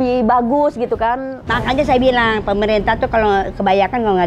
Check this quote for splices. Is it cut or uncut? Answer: cut